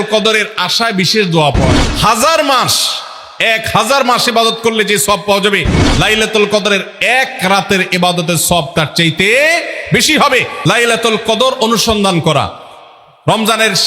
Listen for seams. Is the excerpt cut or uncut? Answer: cut